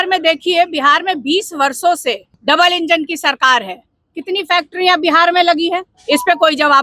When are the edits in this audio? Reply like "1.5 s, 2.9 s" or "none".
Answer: 2.3 s, 5.9 s

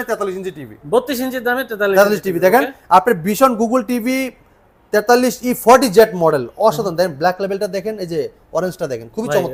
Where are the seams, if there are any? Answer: none

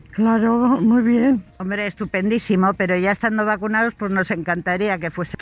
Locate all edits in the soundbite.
1.5 s

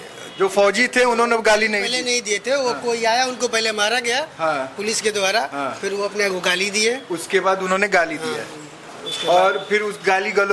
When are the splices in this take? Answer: none

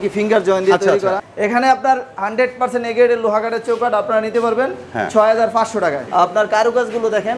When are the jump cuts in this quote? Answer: 1.3 s, 6.1 s

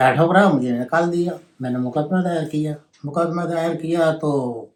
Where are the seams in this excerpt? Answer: none

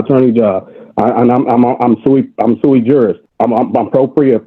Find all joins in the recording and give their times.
3.2 s

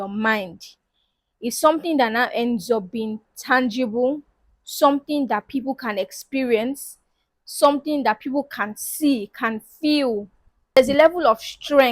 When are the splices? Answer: 10.8 s

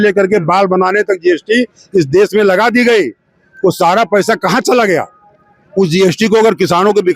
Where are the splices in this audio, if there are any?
none

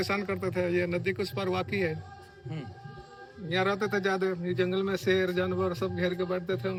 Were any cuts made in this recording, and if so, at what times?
none

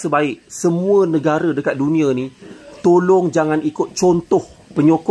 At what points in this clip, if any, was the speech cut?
none

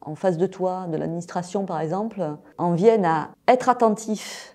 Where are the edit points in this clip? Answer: 2.4 s, 3.3 s

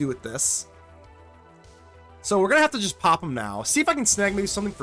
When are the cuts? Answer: none

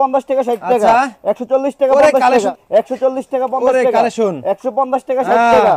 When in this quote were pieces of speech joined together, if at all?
2.5 s

